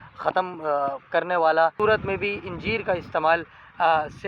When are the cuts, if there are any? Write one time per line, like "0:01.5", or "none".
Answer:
0:01.7